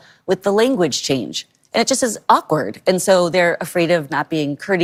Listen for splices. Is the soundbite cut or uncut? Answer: uncut